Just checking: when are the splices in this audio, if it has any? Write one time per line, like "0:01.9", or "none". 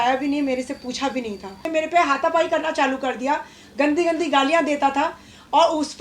0:01.6